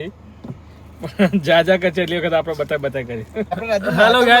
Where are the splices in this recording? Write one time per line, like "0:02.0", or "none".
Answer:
0:03.5